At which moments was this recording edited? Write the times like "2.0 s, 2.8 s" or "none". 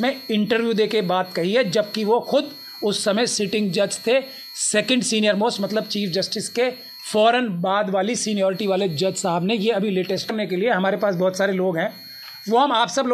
10.3 s